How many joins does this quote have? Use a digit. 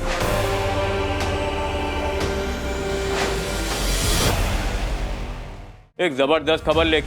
1